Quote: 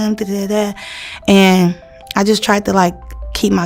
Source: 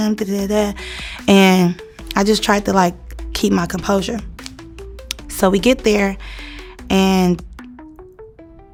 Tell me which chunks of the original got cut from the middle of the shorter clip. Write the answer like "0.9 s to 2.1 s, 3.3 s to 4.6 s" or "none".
none